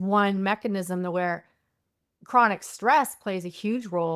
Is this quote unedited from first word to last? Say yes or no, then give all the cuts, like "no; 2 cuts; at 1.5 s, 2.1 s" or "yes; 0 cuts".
yes; 0 cuts